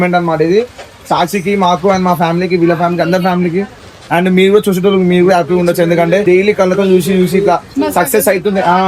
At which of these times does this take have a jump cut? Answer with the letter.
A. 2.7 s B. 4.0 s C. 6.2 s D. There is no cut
C